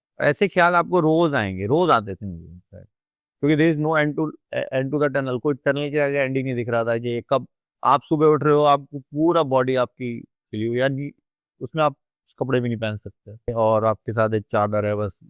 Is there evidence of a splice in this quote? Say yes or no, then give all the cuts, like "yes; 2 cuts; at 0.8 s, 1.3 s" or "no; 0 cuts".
no; 0 cuts